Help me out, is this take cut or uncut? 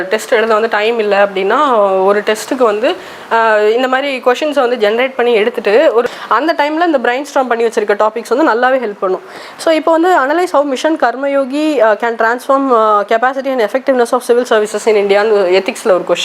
cut